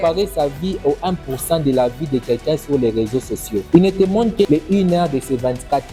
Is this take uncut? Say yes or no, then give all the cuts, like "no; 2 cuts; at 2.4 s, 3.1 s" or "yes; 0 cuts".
yes; 0 cuts